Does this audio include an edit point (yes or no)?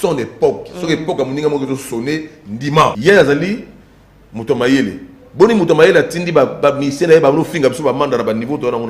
yes